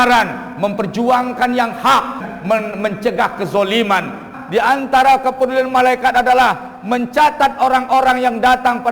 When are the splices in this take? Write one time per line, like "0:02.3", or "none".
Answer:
0:02.2
0:04.3